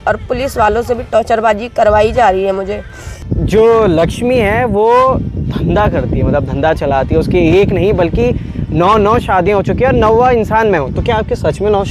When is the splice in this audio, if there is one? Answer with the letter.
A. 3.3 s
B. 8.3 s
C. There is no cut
A